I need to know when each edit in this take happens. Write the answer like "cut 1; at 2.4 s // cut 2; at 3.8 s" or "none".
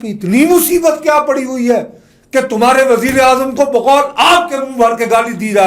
none